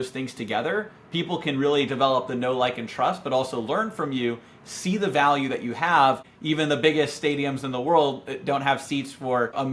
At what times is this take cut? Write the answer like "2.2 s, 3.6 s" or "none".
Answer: 6.2 s